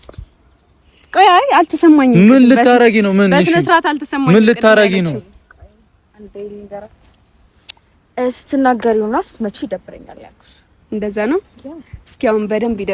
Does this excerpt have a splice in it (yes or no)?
no